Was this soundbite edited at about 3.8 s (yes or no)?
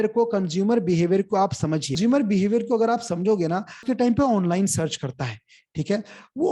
yes